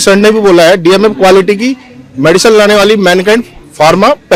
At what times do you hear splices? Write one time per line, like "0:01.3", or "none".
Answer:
none